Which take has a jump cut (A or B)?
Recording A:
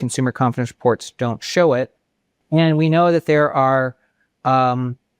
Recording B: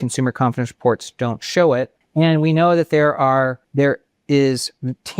B